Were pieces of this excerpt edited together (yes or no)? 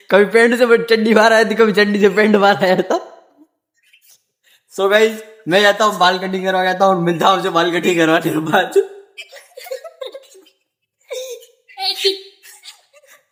no